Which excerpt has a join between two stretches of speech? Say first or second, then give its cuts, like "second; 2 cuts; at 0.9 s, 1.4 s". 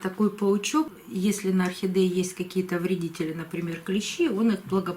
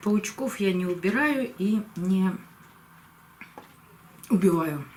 first; 1 cut; at 1.0 s